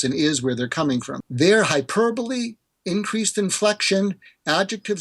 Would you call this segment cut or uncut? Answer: cut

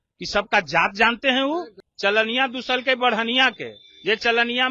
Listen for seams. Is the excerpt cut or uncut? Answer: cut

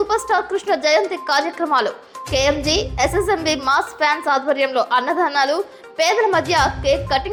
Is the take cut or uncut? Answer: uncut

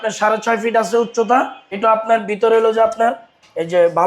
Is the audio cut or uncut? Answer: cut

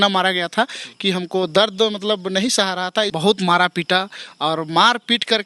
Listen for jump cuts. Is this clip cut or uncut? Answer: cut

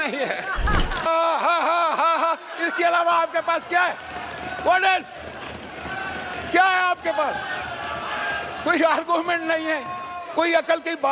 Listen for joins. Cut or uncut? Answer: cut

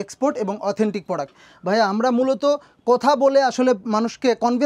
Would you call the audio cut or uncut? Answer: uncut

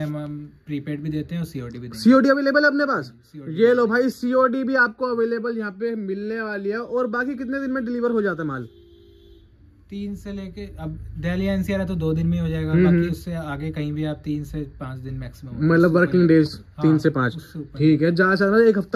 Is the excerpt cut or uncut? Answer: uncut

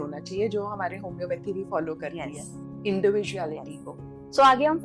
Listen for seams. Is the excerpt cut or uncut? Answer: uncut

